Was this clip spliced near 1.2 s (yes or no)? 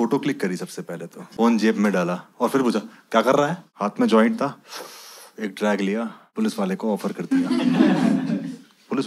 yes